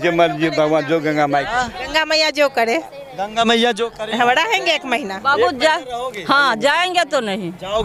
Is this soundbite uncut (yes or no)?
yes